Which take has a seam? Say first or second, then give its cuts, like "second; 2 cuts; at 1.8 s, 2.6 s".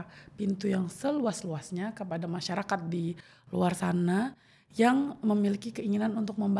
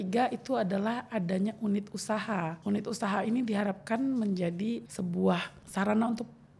second; 1 cut; at 4.8 s